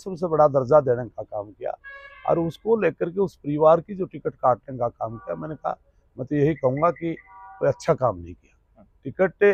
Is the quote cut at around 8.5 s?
no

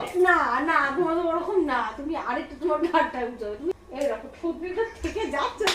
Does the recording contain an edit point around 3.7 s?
yes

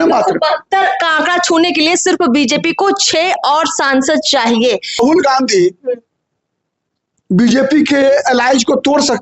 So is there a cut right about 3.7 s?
no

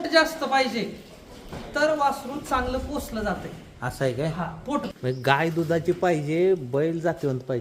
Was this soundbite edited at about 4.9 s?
yes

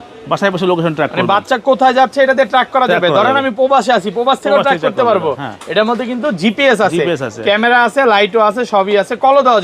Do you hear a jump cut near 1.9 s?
no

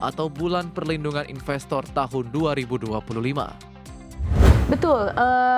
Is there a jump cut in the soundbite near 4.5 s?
yes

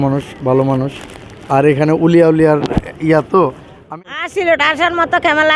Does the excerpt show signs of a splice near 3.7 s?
yes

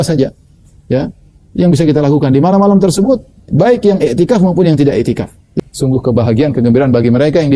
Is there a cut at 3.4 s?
no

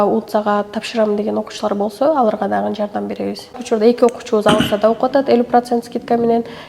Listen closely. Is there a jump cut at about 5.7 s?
no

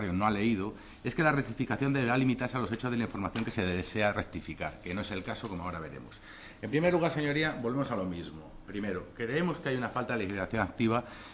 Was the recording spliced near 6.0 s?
yes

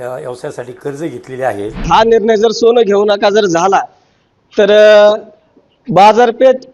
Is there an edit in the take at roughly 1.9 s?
yes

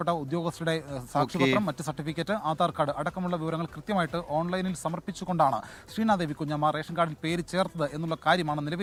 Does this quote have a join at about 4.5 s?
no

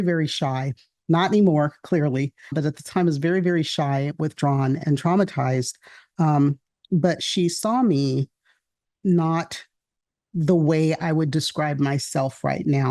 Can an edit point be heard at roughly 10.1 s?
no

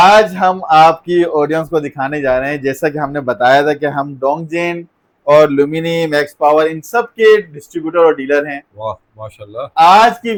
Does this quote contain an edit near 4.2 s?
no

